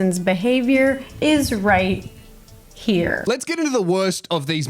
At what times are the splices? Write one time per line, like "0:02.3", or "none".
none